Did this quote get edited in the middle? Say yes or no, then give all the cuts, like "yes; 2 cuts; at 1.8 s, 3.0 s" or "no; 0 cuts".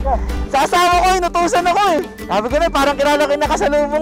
yes; 1 cut; at 2.2 s